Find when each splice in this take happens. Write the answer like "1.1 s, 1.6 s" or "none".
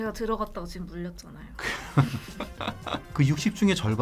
3.1 s